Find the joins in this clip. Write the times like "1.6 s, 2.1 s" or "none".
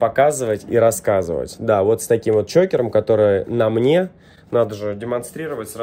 none